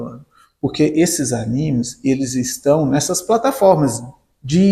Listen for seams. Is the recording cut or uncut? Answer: uncut